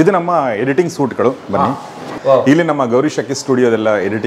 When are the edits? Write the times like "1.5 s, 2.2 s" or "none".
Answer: none